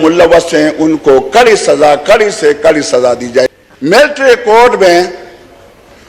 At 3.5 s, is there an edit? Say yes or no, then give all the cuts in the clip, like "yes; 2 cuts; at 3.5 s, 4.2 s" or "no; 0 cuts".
yes; 1 cut; at 3.5 s